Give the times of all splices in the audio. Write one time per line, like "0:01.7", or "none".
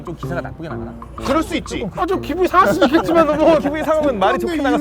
0:01.8